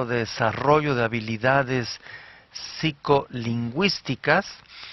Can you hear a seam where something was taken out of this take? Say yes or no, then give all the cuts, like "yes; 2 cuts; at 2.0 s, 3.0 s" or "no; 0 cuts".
yes; 1 cut; at 1.7 s